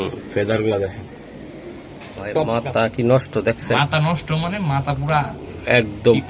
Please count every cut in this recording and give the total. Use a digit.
1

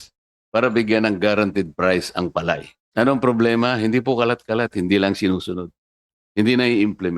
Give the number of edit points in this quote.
1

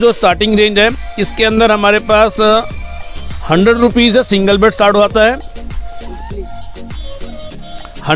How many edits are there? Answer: 0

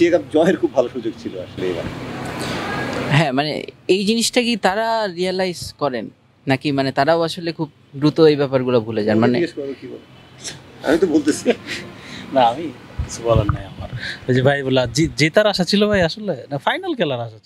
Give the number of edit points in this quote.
0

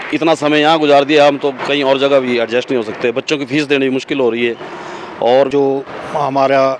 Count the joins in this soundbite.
1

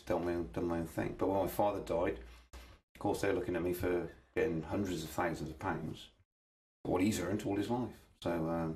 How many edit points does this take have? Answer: 0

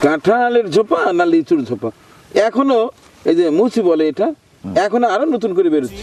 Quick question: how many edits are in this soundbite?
0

